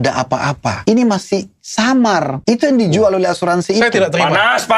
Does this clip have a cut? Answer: yes; 2 cuts; at 0.8 s, 2.4 s

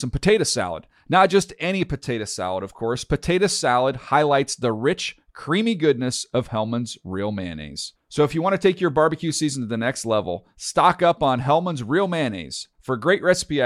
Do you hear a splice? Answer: no; 0 cuts

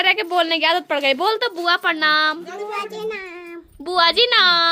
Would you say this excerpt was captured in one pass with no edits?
yes; 0 cuts

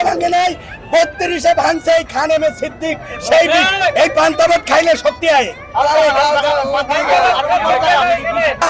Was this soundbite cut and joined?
no; 0 cuts

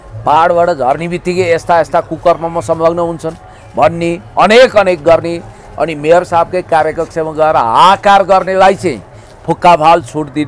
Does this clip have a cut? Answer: no; 0 cuts

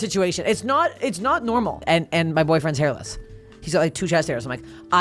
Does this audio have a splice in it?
yes; 1 cut; at 1.8 s

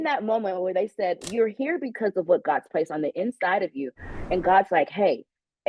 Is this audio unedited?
no; 1 cut; at 1.3 s

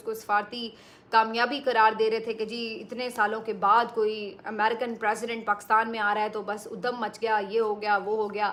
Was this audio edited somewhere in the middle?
no; 0 cuts

